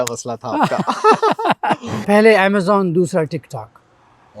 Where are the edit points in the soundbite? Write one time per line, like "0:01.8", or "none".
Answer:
0:01.9